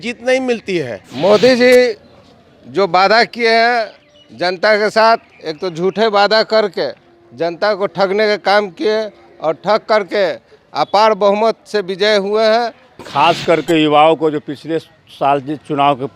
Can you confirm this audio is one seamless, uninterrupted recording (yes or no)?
no